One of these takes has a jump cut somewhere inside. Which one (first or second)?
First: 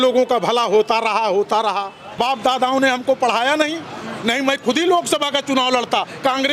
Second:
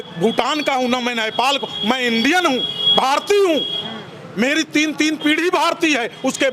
first